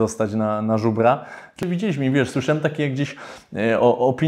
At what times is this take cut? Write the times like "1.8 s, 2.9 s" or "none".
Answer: 1.6 s